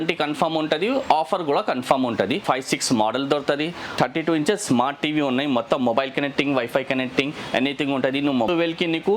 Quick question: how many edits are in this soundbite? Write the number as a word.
three